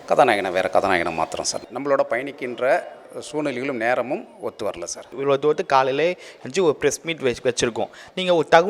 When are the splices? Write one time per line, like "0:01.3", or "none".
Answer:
0:01.6
0:05.1